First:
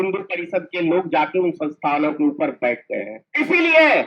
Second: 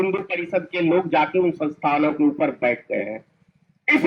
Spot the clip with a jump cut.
first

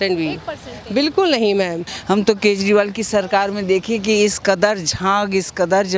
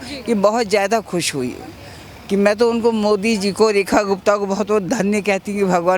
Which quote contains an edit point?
first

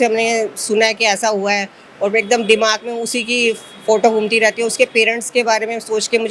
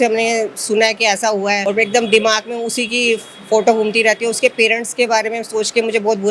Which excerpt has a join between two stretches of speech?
second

